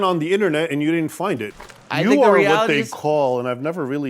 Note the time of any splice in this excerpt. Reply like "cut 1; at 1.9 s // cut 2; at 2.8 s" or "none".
cut 1; at 1.5 s